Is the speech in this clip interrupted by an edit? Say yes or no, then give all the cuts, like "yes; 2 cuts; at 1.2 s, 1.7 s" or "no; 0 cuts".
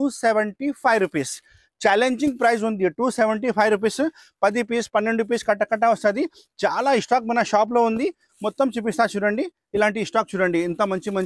no; 0 cuts